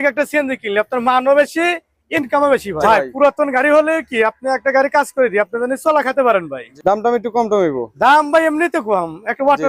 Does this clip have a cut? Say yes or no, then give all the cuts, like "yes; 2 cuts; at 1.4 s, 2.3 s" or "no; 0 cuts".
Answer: yes; 2 cuts; at 2.8 s, 6.6 s